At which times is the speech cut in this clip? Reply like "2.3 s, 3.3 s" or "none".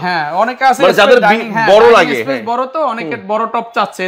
none